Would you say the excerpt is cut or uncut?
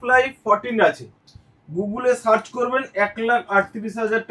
uncut